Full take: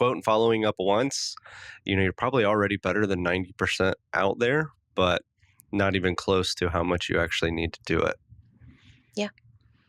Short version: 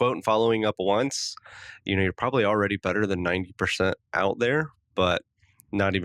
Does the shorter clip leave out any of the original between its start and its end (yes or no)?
no